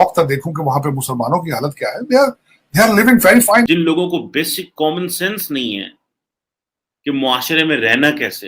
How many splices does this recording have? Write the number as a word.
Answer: one